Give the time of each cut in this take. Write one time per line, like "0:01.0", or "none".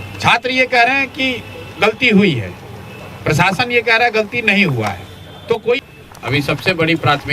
0:05.9